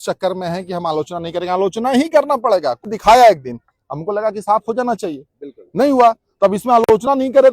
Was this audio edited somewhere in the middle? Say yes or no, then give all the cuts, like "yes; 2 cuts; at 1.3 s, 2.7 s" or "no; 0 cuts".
yes; 1 cut; at 2.8 s